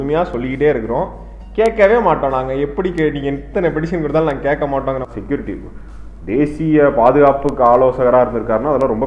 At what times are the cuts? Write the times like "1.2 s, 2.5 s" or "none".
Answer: 5.0 s